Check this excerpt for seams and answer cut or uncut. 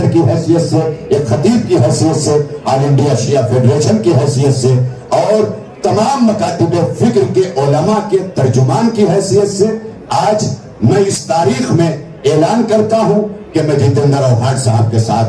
uncut